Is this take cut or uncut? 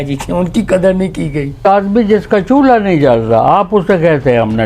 cut